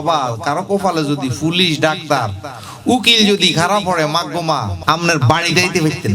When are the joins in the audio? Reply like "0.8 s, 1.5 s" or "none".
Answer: 4.7 s